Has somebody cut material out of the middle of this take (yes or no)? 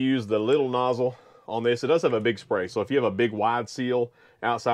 no